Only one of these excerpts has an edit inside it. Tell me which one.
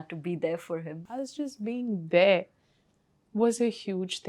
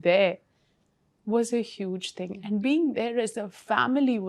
first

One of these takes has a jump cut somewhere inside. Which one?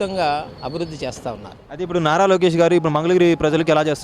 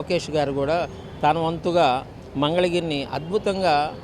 first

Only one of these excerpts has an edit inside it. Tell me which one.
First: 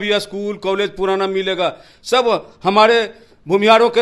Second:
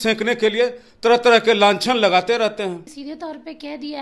second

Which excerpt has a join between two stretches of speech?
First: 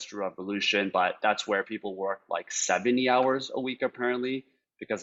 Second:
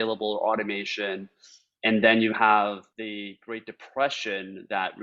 second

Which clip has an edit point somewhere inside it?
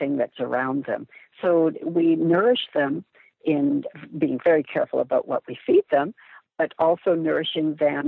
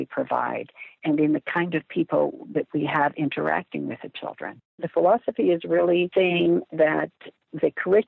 second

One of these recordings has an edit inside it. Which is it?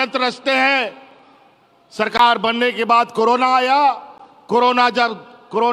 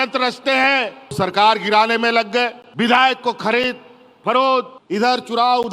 second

